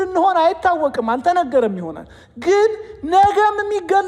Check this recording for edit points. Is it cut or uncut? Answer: uncut